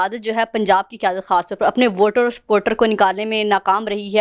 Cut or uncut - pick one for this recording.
uncut